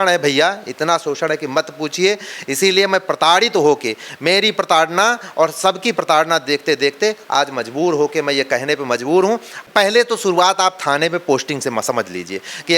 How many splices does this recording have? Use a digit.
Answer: 1